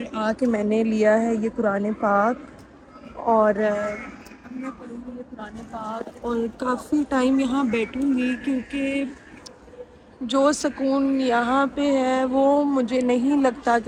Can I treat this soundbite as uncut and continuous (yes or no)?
yes